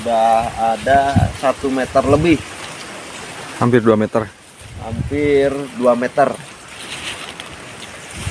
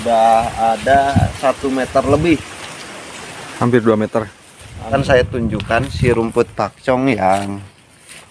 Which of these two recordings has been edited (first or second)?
second